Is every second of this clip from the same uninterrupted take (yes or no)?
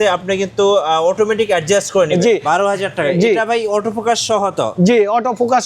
no